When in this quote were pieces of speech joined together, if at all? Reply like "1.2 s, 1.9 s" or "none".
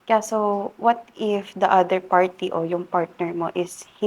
none